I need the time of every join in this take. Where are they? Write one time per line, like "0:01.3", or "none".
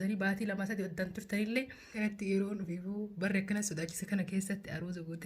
0:01.9